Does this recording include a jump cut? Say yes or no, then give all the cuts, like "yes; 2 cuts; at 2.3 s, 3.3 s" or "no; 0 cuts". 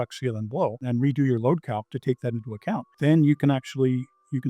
yes; 2 cuts; at 0.8 s, 2.9 s